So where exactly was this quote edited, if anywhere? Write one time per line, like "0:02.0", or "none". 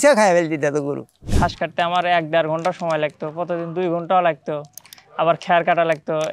0:01.3